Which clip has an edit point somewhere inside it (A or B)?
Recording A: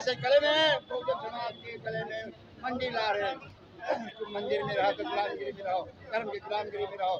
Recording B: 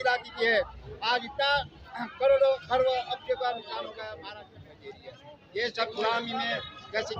B